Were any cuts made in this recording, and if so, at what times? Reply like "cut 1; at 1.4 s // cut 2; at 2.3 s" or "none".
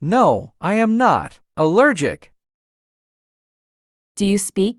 none

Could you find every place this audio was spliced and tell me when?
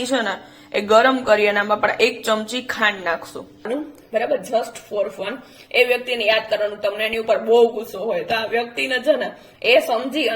cut 1; at 3.7 s

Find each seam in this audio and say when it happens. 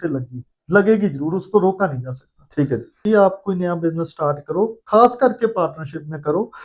cut 1; at 3.0 s

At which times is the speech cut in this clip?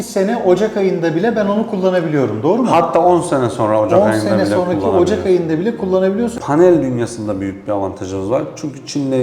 cut 1; at 6.3 s

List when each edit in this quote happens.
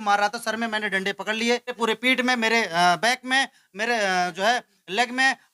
cut 1; at 1.8 s

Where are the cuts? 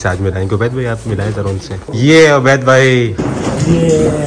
cut 1; at 1.9 s

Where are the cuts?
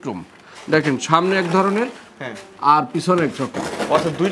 none

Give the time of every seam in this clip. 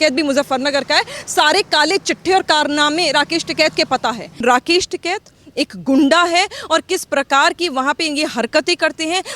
cut 1; at 4.4 s

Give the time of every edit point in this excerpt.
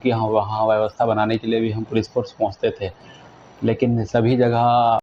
none

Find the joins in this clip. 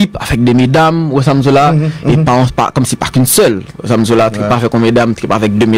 none

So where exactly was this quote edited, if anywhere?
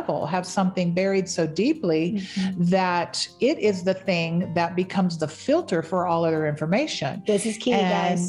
none

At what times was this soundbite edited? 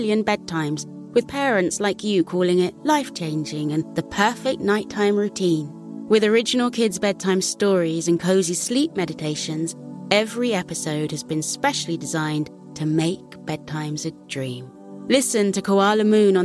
none

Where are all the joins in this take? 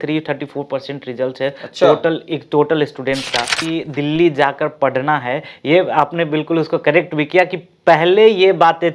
cut 1; at 3.6 s

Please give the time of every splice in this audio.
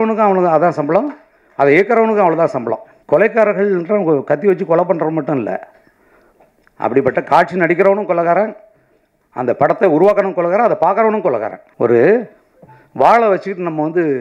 cut 1; at 2.9 s // cut 2; at 11.6 s

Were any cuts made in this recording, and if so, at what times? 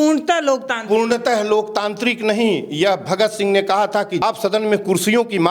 cut 1; at 4.2 s

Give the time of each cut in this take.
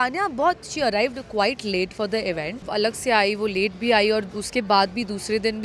cut 1; at 2.7 s

